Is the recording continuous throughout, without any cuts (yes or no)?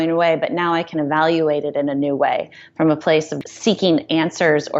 no